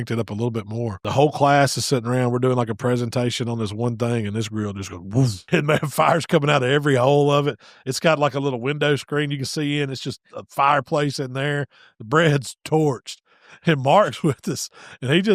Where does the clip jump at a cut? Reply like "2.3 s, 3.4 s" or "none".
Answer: 1.0 s, 5.4 s